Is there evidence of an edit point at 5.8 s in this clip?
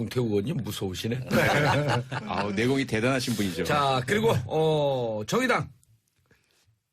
no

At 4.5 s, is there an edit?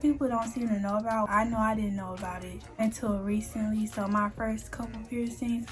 no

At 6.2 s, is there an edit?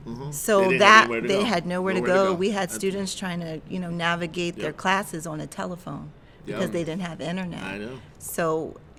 no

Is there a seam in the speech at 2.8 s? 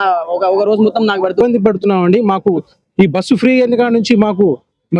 no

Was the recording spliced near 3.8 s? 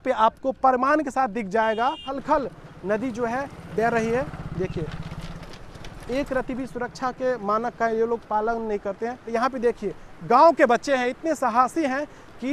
no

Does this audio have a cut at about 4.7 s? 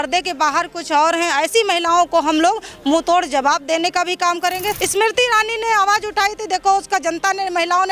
yes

